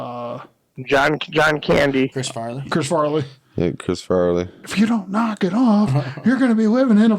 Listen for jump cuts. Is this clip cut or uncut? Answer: cut